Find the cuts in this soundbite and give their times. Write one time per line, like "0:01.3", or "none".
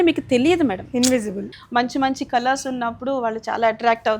0:01.5